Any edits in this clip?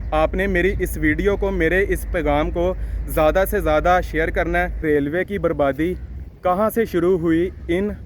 yes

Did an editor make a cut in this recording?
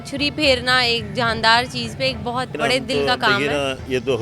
yes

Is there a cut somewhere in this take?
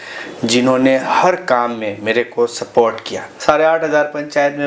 yes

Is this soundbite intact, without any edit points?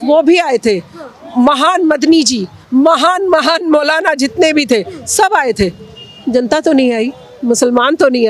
yes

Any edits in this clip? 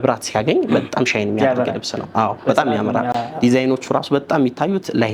no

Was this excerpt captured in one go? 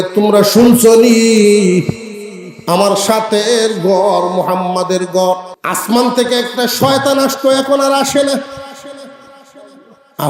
no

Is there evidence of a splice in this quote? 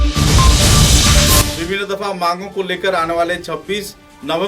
yes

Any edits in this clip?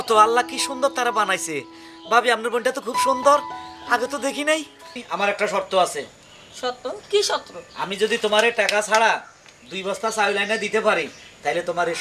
yes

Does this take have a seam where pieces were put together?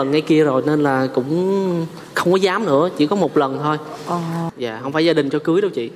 yes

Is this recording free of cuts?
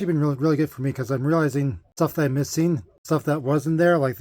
no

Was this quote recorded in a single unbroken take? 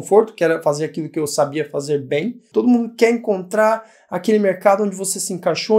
no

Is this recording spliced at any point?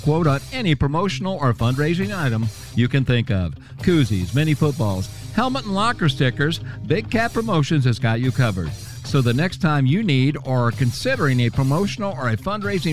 no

